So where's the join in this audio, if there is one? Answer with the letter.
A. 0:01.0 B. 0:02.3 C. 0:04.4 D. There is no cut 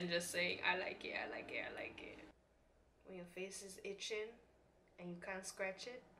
B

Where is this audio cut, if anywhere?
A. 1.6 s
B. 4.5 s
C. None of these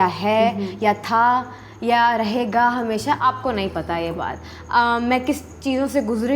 C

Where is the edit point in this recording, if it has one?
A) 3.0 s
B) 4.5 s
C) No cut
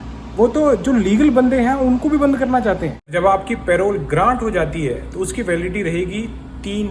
A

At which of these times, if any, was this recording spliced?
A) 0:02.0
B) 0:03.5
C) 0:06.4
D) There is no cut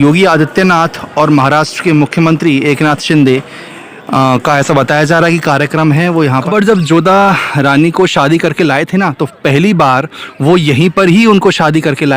C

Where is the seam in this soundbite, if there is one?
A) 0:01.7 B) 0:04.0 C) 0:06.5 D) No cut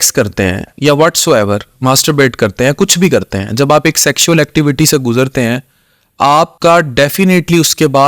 C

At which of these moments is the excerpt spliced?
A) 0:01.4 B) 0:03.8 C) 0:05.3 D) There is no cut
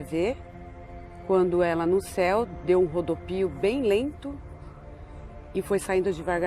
B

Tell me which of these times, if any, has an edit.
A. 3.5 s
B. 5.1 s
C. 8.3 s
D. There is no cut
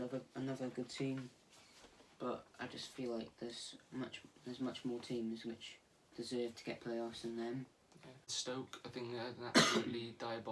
C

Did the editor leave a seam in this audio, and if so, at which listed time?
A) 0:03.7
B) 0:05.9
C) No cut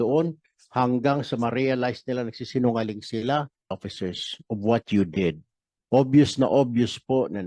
A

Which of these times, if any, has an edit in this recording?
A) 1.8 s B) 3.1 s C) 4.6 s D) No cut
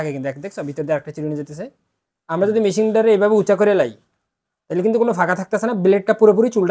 D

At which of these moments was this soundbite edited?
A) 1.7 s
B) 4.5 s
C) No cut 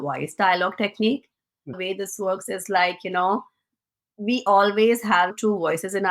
A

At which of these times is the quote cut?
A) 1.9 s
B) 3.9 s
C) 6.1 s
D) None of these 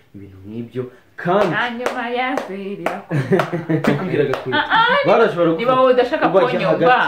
B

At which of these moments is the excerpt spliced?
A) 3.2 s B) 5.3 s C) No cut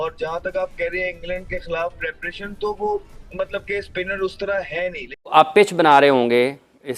B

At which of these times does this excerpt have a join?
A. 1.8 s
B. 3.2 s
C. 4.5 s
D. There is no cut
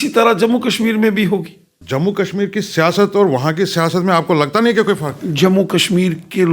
A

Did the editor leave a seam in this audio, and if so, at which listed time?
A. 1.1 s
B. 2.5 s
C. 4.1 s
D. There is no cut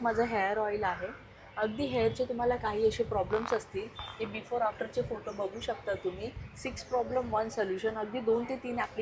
D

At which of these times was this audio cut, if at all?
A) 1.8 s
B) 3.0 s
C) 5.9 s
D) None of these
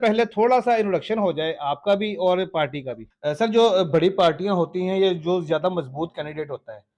B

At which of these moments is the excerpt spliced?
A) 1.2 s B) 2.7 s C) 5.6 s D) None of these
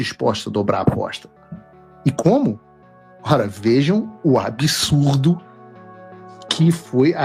D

